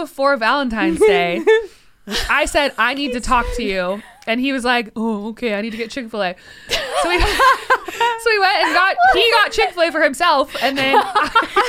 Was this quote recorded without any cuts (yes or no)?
yes